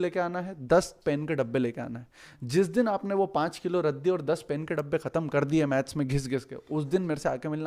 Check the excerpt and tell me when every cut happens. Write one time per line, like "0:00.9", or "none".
none